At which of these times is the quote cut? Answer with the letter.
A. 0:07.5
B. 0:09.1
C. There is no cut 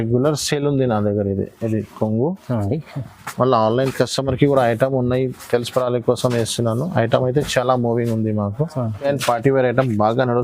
B